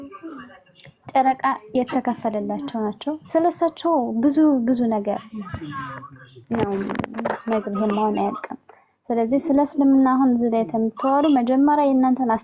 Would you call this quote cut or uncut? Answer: uncut